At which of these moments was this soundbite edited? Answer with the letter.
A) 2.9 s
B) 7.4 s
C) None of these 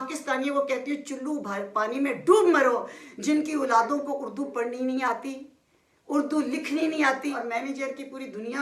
B